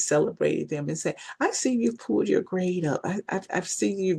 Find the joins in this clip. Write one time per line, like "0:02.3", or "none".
none